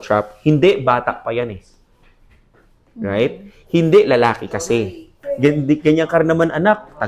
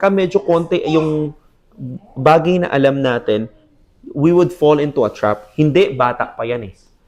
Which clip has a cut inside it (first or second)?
first